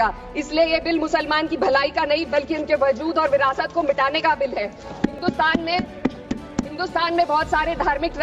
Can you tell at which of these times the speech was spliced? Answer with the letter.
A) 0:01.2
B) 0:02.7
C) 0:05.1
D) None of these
D